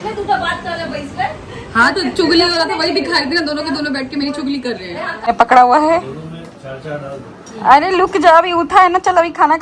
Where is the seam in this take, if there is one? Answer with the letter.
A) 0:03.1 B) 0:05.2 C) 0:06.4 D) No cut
B